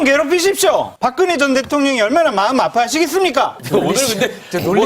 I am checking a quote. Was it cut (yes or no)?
yes